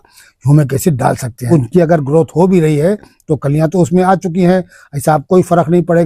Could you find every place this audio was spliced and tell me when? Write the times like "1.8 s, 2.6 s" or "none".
1.5 s